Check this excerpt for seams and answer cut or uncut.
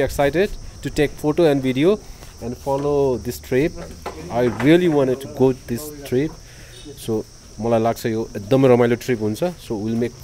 uncut